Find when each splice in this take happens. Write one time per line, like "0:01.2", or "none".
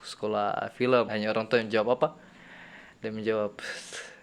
0:01.1